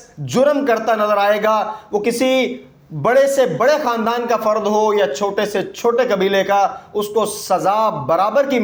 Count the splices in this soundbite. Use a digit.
0